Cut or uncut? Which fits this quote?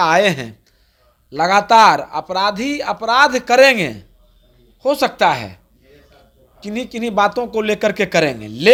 uncut